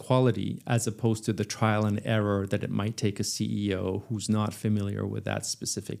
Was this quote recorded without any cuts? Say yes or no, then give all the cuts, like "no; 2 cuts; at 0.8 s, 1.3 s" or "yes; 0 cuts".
yes; 0 cuts